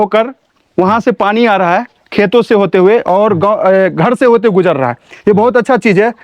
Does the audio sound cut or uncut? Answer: uncut